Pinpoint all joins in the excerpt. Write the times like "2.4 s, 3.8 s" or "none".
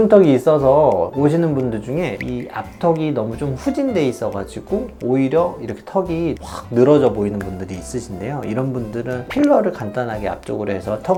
none